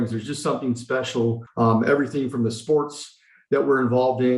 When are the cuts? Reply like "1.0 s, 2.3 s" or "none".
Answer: 1.4 s